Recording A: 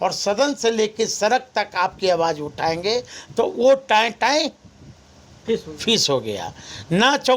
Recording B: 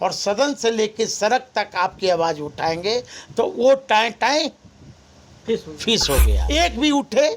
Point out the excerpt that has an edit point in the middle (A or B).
B